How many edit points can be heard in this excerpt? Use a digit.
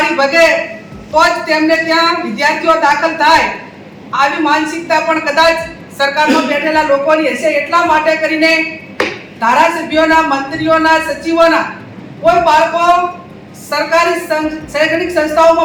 0